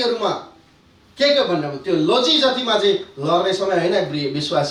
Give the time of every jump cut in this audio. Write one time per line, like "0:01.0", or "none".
none